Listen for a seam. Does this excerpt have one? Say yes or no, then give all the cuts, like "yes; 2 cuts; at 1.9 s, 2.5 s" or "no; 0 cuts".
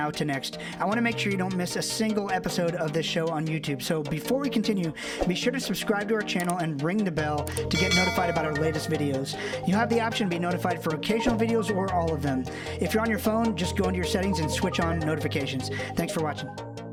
no; 0 cuts